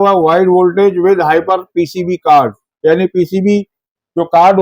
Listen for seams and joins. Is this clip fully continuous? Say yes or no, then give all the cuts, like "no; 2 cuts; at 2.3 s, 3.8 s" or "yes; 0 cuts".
yes; 0 cuts